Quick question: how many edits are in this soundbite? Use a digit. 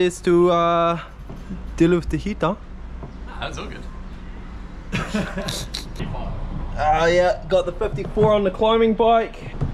0